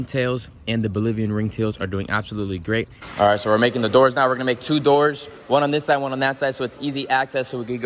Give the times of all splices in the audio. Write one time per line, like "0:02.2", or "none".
0:03.0